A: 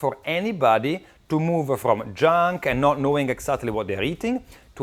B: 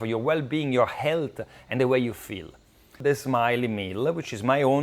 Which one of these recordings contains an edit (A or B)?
B